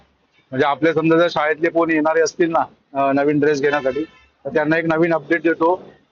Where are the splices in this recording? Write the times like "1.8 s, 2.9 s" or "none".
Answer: none